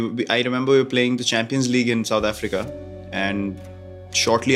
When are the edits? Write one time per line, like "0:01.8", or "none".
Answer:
none